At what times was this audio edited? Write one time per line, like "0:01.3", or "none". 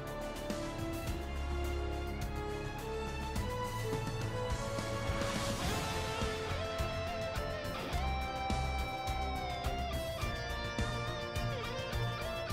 none